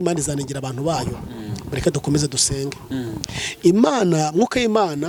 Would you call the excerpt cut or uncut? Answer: uncut